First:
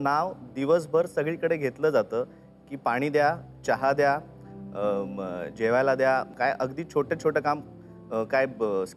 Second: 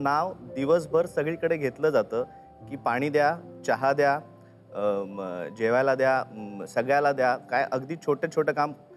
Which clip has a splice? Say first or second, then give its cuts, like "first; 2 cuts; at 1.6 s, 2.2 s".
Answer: first; 1 cut; at 6.3 s